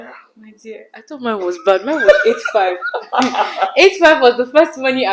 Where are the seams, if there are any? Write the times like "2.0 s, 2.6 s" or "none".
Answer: none